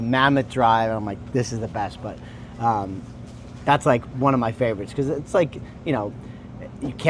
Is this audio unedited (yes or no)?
yes